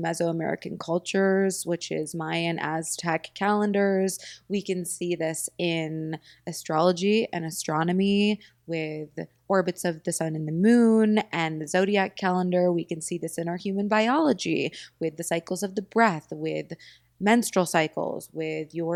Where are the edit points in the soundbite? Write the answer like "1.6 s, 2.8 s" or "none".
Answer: none